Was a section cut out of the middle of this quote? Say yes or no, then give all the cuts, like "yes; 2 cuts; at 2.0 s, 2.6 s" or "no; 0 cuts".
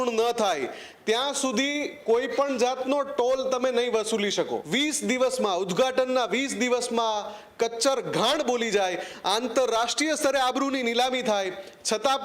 yes; 1 cut; at 4.6 s